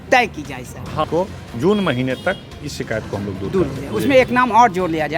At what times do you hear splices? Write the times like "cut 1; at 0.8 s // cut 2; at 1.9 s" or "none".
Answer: cut 1; at 1.1 s

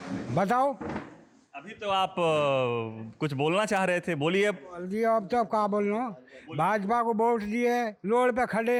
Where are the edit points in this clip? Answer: none

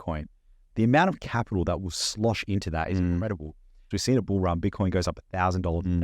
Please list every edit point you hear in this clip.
cut 1; at 3.9 s

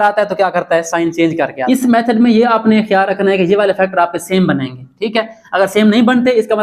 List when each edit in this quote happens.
cut 1; at 1.6 s

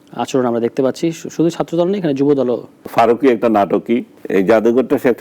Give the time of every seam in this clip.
cut 1; at 2.8 s // cut 2; at 4.1 s

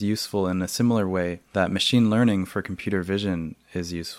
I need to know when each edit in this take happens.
none

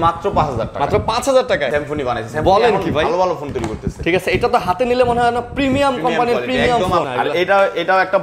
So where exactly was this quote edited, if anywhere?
cut 1; at 1.7 s // cut 2; at 7.1 s

